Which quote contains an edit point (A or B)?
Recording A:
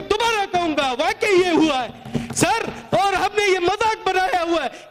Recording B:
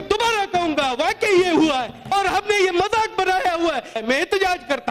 B